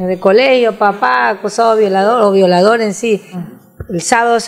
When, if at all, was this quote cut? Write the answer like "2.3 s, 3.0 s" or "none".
3.4 s